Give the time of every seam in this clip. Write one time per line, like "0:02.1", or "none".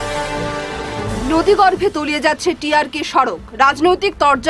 0:00.9